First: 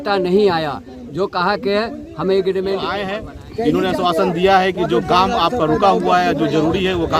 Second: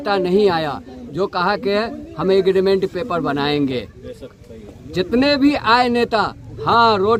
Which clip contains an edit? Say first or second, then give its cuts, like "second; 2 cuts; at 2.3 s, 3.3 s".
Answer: first; 1 cut; at 3.0 s